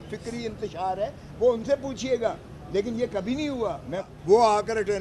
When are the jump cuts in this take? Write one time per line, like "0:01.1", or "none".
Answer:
0:04.0